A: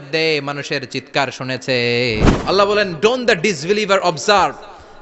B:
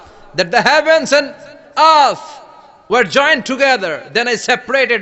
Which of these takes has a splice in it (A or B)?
A